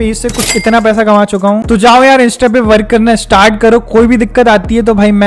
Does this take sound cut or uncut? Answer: uncut